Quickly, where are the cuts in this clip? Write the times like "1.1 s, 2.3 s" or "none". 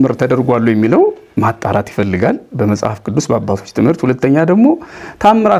none